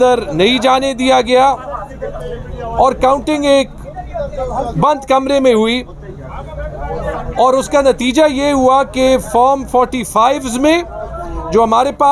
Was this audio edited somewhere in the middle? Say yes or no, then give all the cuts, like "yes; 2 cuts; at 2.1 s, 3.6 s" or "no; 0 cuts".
no; 0 cuts